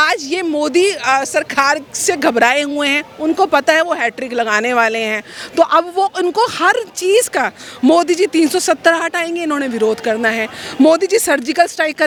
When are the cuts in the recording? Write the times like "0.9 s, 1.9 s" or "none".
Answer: none